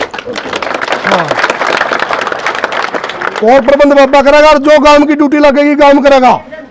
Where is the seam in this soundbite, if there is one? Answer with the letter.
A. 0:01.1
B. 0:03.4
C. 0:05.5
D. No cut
D